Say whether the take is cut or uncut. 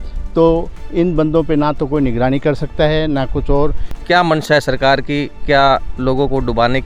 cut